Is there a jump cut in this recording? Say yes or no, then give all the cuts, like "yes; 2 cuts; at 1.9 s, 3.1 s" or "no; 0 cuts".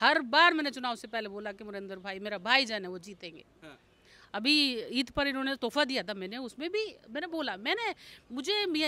no; 0 cuts